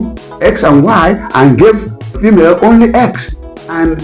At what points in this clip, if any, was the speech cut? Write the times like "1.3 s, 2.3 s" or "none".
2.1 s